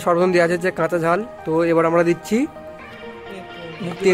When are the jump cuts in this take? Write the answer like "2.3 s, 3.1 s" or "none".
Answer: none